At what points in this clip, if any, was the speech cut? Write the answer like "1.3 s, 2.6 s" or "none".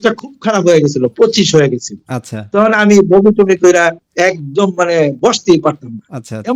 none